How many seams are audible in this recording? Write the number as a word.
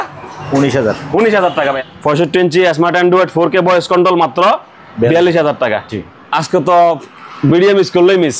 two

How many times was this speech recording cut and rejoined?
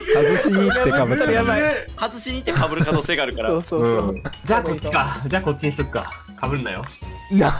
two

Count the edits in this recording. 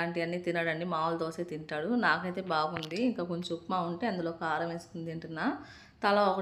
zero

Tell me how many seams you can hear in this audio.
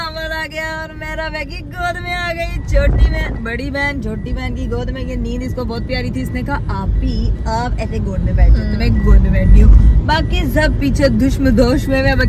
zero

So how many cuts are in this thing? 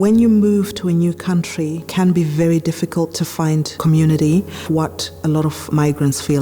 two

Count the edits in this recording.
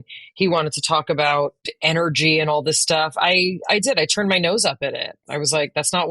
one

